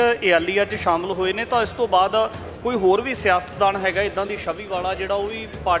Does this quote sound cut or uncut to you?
uncut